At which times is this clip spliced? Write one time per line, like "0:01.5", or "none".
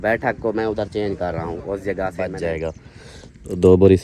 0:02.2